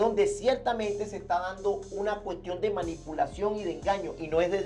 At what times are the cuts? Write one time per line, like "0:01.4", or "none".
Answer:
none